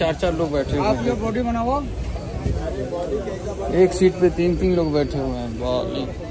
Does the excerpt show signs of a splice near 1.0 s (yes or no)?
no